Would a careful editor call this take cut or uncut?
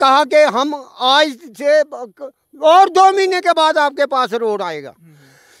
uncut